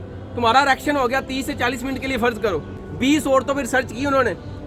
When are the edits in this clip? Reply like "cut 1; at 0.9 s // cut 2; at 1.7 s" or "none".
cut 1; at 2.7 s